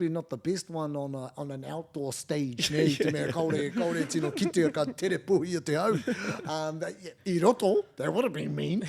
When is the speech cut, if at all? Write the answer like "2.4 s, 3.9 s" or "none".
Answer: none